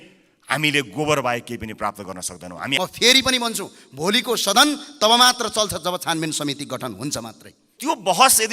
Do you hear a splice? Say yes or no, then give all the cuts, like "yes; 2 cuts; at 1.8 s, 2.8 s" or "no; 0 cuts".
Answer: yes; 2 cuts; at 2.7 s, 7.6 s